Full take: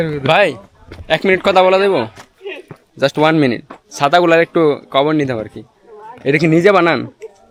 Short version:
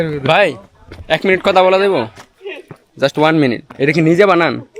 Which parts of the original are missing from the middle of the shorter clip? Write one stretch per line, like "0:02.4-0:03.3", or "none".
0:03.7-0:06.1